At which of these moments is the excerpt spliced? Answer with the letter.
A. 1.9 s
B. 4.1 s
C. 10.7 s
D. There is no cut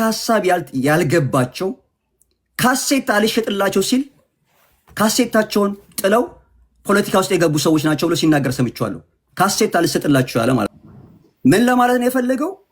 C